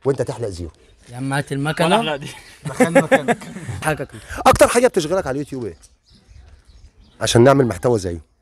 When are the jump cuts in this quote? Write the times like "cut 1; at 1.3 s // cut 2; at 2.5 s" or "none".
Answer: cut 1; at 3.8 s